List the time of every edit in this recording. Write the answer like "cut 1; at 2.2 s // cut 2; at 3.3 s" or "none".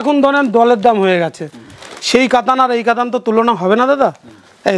none